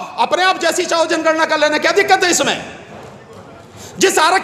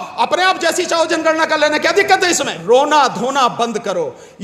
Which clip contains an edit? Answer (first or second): second